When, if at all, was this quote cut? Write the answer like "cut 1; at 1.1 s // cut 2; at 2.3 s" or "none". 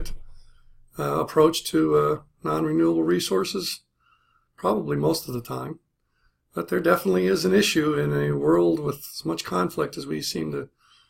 cut 1; at 1.8 s